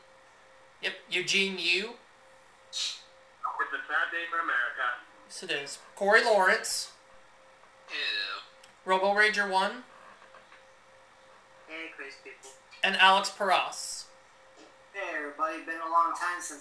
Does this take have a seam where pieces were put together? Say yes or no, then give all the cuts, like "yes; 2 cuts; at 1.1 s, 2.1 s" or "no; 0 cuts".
yes; 1 cut; at 1.5 s